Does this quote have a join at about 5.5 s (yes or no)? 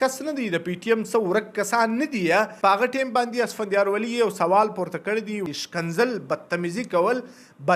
yes